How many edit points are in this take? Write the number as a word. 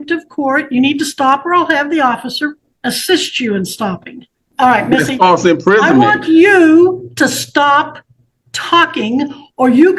two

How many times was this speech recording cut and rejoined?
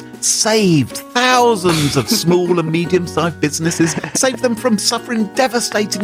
one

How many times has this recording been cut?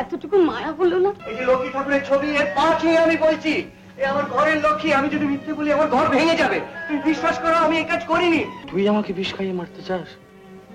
two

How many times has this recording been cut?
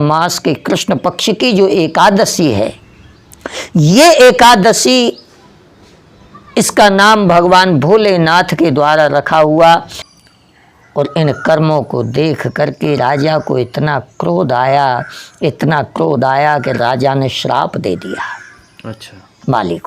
one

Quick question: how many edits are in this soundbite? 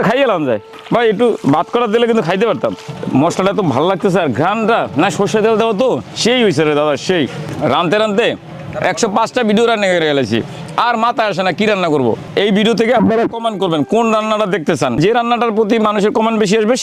five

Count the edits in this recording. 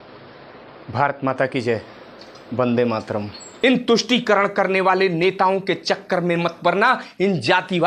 one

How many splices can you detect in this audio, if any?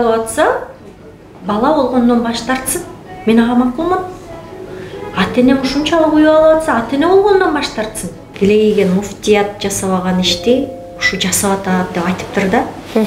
one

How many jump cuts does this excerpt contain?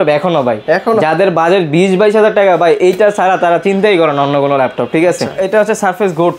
one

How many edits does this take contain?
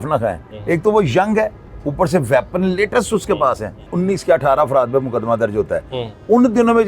one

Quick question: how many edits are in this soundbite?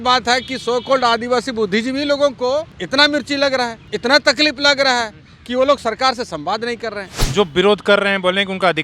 three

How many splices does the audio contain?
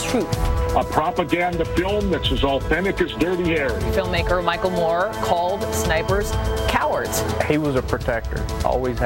zero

